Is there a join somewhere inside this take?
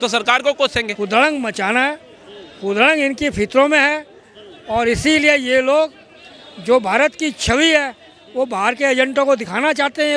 yes; 1 cut; at 0.9 s

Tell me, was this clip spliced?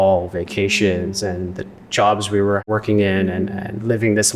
yes; 1 cut; at 2.7 s

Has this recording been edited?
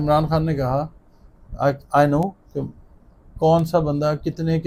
no; 0 cuts

